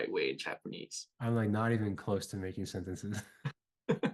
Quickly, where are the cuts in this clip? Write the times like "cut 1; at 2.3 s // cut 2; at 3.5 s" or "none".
cut 1; at 1.1 s